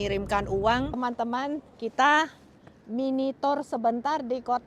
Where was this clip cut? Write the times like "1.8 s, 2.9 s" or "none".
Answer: 0.9 s